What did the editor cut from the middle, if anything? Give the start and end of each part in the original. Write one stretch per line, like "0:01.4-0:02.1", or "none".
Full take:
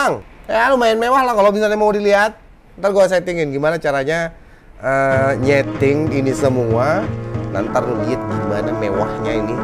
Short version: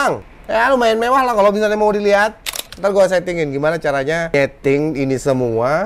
0:04.3-0:05.5